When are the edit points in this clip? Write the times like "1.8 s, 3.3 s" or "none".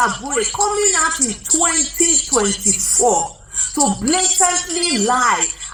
none